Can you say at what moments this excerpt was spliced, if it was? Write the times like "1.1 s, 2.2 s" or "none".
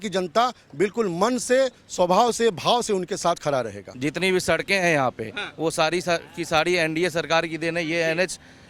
3.8 s

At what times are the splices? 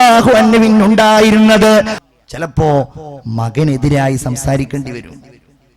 2.0 s

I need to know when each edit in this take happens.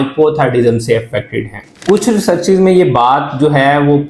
1.7 s

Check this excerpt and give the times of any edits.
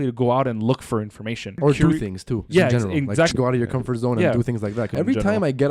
1.6 s, 3.3 s, 4.9 s

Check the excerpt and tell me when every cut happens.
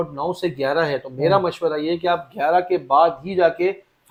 none

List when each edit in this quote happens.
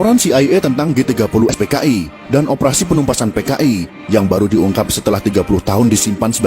1.5 s

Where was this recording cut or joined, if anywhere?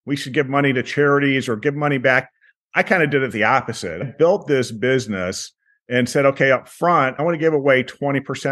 4.0 s, 7.2 s

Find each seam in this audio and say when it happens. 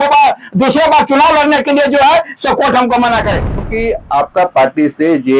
3.5 s

